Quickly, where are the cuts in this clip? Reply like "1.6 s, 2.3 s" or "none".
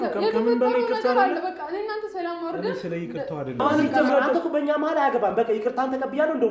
3.6 s